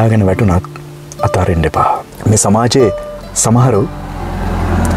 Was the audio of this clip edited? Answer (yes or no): yes